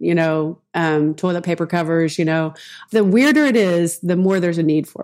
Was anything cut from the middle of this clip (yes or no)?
yes